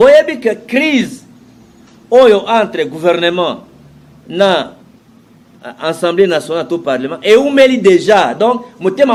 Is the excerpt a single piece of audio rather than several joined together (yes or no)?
yes